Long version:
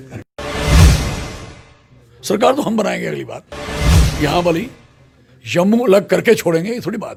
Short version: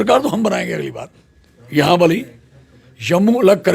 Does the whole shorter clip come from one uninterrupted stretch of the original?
no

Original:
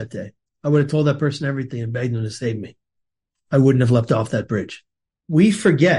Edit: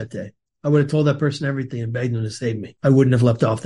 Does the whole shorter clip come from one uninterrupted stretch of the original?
no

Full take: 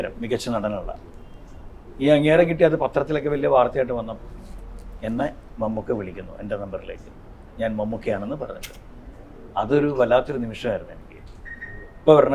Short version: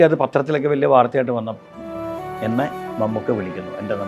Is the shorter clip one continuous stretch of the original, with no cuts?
yes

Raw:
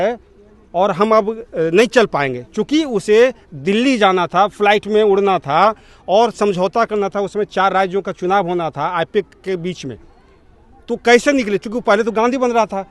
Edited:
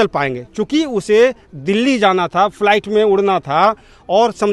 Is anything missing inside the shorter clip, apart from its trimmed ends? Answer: no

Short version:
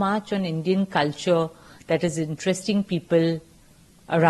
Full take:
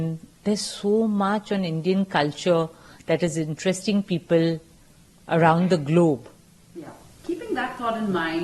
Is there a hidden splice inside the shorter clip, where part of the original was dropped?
no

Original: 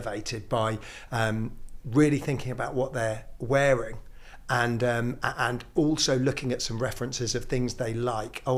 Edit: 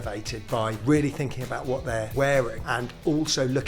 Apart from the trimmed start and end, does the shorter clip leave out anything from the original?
yes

